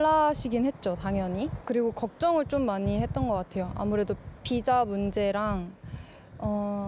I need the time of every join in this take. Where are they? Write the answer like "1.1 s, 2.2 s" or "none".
none